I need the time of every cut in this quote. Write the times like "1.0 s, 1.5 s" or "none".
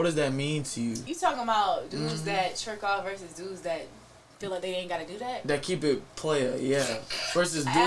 1.1 s